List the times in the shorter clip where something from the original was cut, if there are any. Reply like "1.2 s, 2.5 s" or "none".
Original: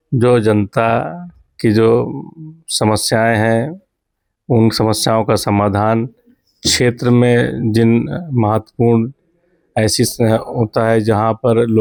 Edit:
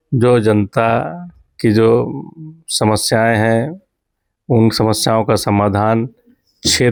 none